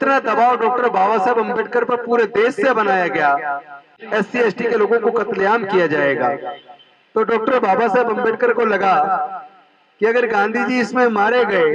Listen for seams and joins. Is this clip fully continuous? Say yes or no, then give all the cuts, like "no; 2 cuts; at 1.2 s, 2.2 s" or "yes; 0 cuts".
no; 1 cut; at 3.9 s